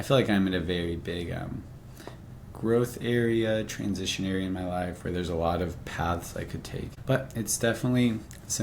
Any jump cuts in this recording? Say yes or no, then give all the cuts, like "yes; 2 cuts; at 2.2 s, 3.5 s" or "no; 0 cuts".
yes; 1 cut; at 6.9 s